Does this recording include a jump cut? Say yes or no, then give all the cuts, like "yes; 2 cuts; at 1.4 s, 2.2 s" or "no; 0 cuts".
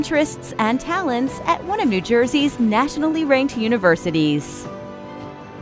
yes; 1 cut; at 4.4 s